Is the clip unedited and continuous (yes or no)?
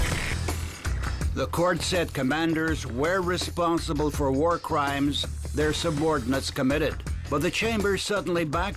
yes